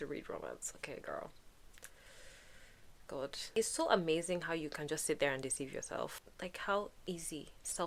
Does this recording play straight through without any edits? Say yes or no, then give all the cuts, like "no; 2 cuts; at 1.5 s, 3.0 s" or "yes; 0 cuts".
yes; 0 cuts